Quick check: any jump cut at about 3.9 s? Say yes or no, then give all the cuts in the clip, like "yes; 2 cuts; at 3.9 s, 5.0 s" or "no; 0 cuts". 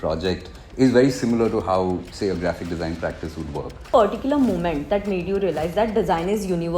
yes; 1 cut; at 3.9 s